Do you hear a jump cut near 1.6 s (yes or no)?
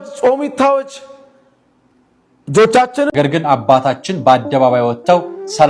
no